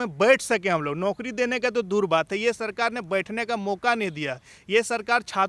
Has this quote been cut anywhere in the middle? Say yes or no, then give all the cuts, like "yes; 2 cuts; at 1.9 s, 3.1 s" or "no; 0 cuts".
no; 0 cuts